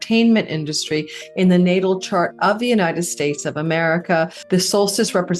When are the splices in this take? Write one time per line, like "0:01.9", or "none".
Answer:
0:04.4